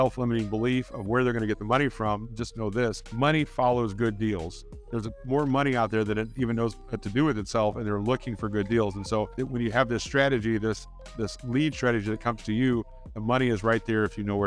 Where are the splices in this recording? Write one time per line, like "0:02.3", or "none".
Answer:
0:03.0
0:09.4